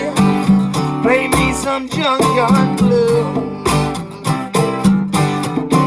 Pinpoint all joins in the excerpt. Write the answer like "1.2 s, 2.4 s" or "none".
none